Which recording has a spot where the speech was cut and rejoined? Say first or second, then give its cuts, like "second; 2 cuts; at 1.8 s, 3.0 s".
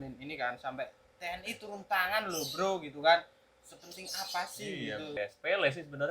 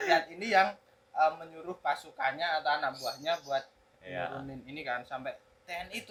first; 1 cut; at 5.2 s